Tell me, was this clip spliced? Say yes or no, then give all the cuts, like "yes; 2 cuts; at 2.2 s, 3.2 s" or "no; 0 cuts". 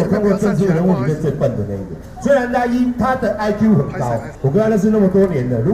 yes; 1 cut; at 4.3 s